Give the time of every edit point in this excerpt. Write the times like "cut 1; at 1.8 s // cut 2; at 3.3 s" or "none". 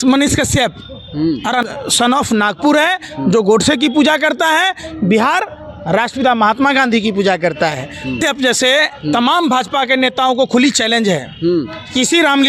cut 1; at 1.6 s // cut 2; at 8.1 s